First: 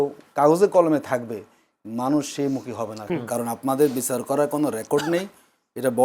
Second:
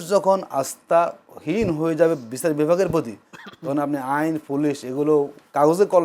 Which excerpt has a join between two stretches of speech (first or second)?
first